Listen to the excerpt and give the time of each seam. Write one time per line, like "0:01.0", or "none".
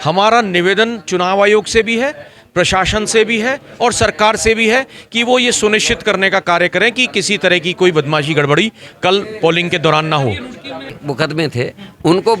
0:11.0